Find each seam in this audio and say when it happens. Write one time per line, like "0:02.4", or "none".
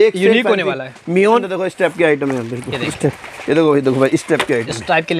0:01.4